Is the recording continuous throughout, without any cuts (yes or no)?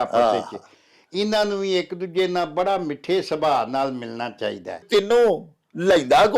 no